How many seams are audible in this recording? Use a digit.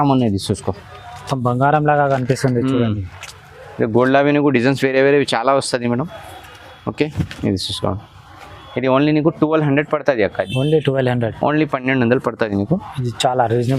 0